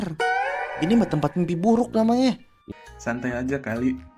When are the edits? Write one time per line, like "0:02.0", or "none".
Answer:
0:02.5